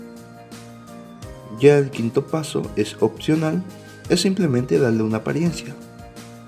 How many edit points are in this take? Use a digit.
1